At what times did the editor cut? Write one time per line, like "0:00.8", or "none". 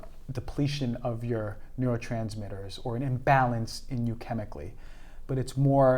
none